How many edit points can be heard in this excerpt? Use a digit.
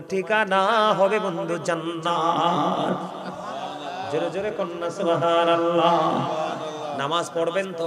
0